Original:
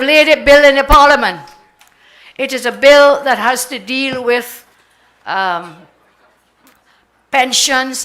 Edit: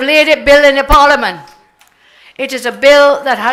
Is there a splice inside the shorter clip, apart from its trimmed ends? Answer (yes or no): no